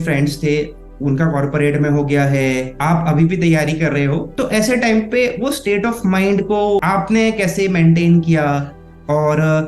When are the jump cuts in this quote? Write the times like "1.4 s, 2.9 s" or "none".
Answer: 2.7 s, 4.3 s, 6.8 s

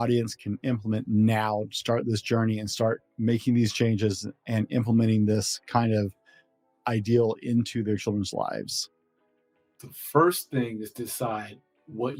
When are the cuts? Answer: none

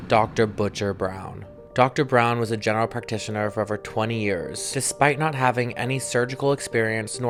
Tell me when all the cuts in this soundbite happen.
none

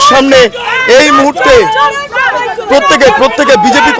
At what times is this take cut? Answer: none

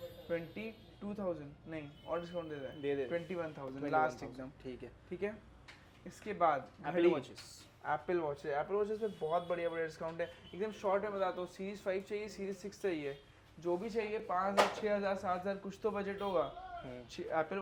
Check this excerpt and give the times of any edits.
none

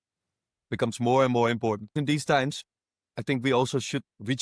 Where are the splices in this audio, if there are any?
1.9 s

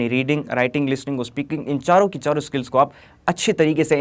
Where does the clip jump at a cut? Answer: none

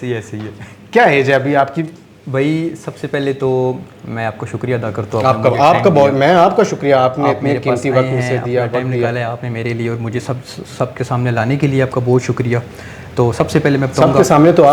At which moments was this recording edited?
none

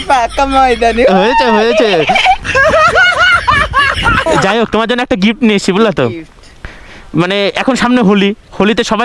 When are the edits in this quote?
4.5 s

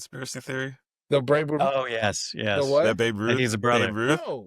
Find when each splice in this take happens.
none

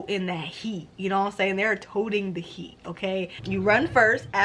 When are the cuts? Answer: 3.4 s

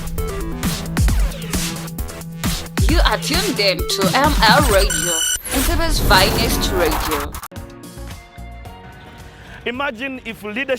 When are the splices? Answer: 7.5 s

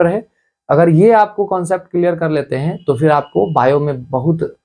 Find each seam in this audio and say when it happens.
none

